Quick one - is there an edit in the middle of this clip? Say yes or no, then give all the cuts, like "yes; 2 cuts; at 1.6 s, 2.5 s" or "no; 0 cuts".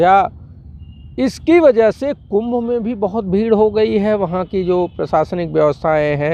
no; 0 cuts